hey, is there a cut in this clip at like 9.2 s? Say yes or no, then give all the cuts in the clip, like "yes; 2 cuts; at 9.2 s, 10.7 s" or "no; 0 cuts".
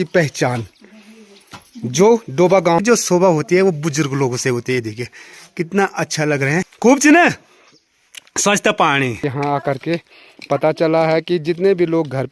yes; 3 cuts; at 2.8 s, 6.7 s, 9.2 s